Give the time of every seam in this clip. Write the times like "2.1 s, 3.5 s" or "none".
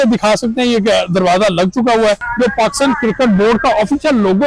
2.3 s